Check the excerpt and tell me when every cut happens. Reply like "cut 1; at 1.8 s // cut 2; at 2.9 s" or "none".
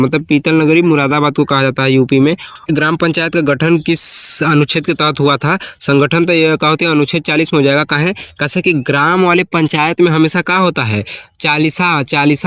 cut 1; at 2.5 s

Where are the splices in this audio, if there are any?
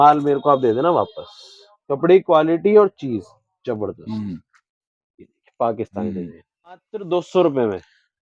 cut 1; at 6.9 s

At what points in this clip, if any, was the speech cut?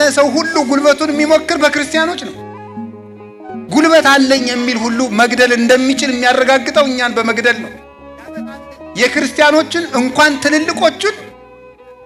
none

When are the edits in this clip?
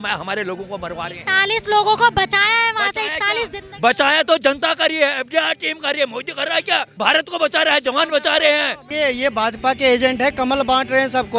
cut 1; at 6.9 s // cut 2; at 8.8 s

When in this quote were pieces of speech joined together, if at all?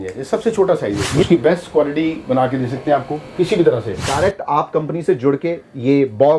cut 1; at 1.2 s // cut 2; at 4.0 s

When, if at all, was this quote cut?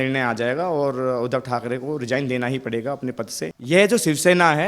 cut 1; at 3.6 s

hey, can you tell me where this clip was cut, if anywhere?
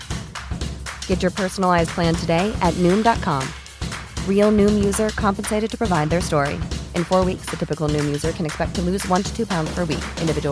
none

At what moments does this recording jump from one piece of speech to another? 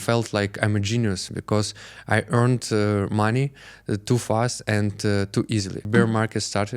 cut 1; at 5.8 s

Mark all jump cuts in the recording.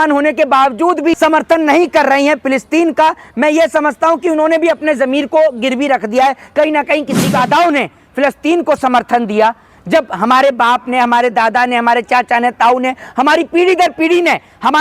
cut 1; at 1.2 s // cut 2; at 7.3 s

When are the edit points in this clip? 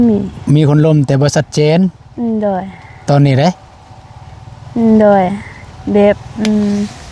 none

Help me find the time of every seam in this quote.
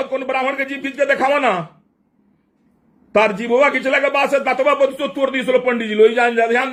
none

